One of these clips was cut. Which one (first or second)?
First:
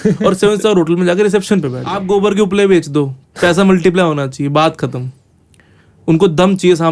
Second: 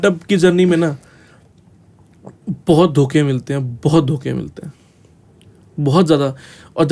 first